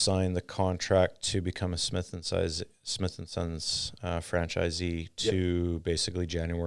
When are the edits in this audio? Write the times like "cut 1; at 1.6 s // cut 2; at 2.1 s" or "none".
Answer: none